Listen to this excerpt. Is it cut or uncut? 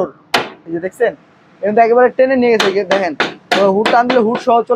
uncut